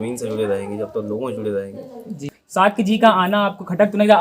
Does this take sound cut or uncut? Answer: cut